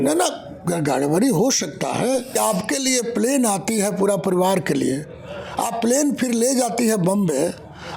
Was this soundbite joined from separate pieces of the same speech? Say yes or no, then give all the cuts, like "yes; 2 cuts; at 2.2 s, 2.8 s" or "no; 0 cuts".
yes; 1 cut; at 2.3 s